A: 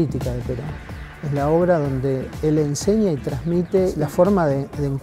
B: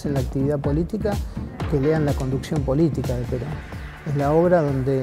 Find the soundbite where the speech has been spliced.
A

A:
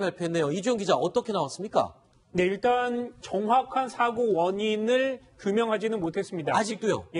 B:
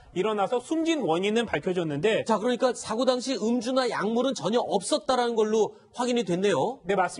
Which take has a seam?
B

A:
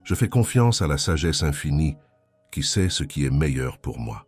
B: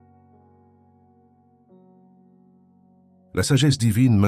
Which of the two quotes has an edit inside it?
B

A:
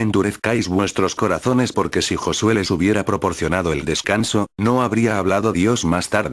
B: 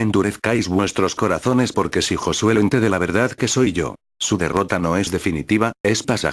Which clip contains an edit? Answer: A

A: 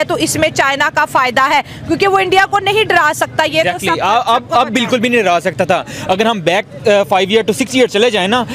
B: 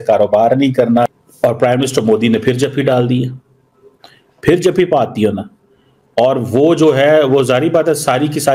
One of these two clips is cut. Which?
B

